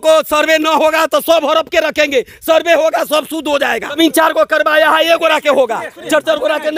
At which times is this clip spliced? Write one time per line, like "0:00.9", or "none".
0:04.0